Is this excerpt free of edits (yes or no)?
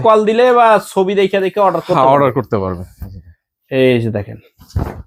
yes